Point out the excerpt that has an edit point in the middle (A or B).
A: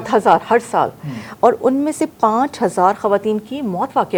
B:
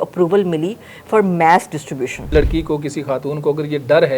B